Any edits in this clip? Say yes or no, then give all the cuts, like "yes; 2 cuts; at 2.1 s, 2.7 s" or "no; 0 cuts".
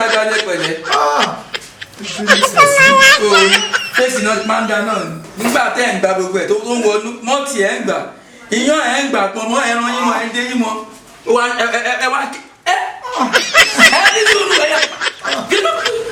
no; 0 cuts